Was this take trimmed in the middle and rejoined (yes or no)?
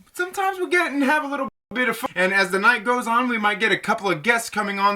yes